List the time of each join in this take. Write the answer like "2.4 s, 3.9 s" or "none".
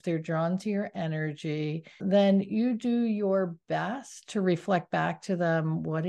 2.0 s